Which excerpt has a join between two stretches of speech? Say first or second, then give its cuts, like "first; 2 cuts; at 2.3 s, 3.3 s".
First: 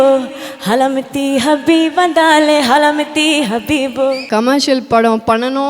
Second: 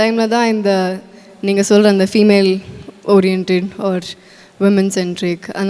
first; 1 cut; at 4.2 s